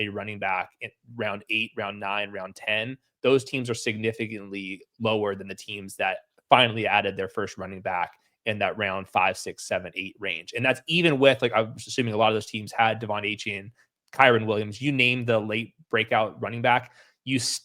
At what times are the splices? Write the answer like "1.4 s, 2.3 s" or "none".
none